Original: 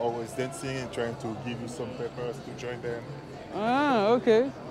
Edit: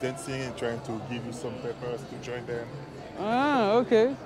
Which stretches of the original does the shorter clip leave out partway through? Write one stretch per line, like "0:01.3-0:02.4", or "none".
none